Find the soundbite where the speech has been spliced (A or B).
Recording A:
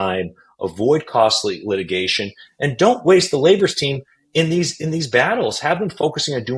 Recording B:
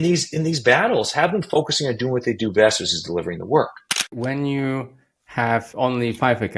B